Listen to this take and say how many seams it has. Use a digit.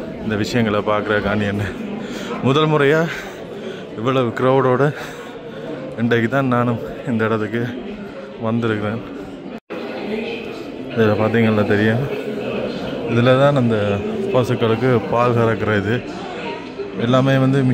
0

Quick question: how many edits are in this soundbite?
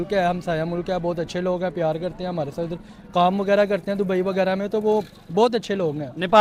0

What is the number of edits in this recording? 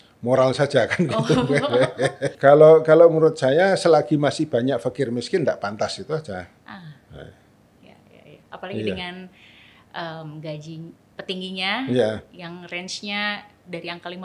1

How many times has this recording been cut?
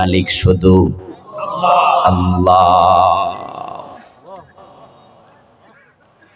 0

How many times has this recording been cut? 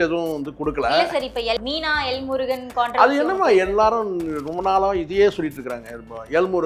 0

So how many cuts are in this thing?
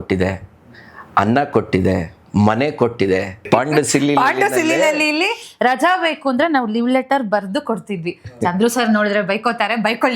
1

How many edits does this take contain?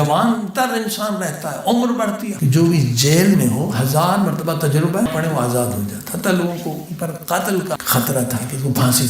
3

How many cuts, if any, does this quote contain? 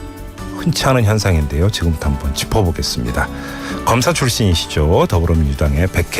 1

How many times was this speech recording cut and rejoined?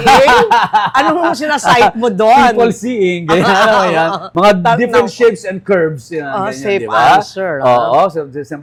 0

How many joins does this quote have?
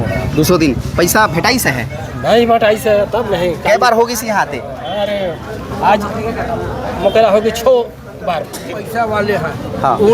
1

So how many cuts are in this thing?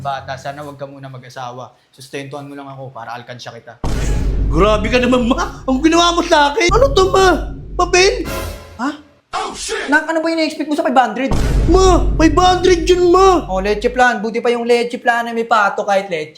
1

